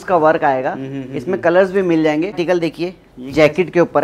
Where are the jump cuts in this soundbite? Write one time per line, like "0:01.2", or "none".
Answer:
0:02.4